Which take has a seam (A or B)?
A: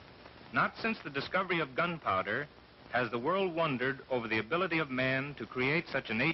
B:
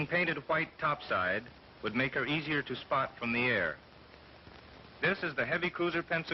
A